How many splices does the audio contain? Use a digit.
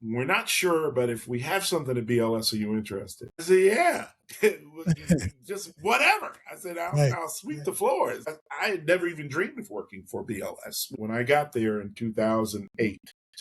1